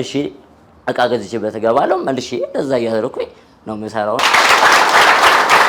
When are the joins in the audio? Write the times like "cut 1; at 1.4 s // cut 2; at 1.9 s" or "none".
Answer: cut 1; at 4.2 s

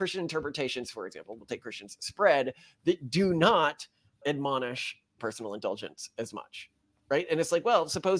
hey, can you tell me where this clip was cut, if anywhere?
cut 1; at 5.2 s

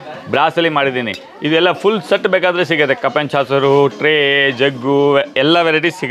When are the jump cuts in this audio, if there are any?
none

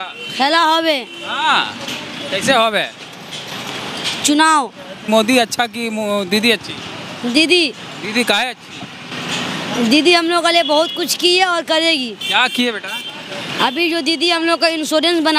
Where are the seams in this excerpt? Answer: cut 1; at 4.9 s

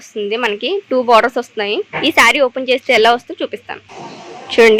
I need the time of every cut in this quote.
none

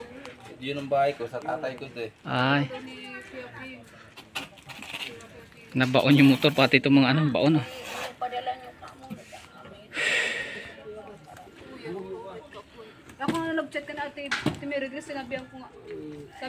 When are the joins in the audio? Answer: none

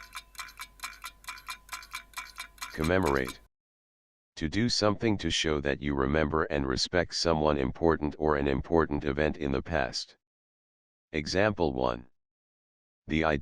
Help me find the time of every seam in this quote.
cut 1; at 2.7 s

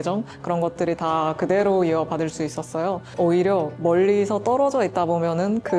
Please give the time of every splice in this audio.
cut 1; at 3.1 s

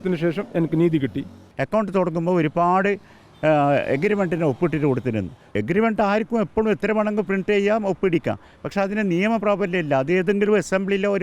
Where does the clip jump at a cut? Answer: cut 1; at 1.4 s // cut 2; at 5.5 s

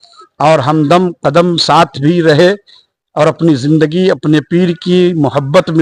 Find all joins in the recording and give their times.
none

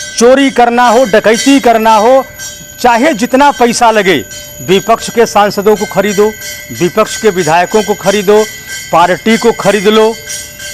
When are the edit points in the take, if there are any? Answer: none

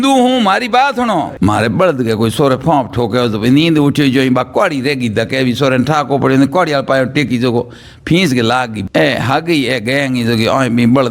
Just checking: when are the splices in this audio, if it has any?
cut 1; at 1.3 s // cut 2; at 8.8 s

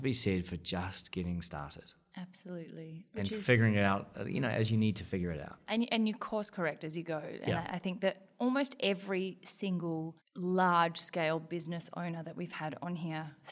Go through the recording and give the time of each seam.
none

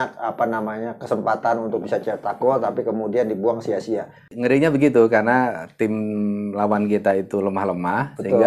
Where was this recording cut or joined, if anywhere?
cut 1; at 4.3 s

